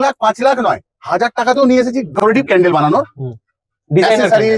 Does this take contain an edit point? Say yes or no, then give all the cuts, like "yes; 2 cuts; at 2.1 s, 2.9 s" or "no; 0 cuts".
no; 0 cuts